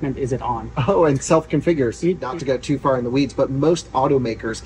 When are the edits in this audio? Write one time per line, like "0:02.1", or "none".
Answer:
0:02.2